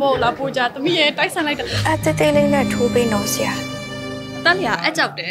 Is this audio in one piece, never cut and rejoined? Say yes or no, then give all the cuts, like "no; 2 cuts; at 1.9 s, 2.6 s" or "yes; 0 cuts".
no; 2 cuts; at 1.8 s, 4.4 s